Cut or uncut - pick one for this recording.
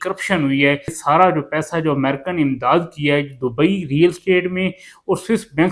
cut